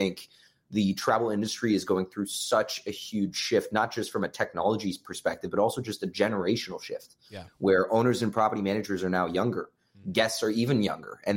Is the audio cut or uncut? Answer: uncut